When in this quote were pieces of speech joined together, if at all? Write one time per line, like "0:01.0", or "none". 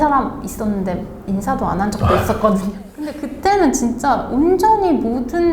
0:03.2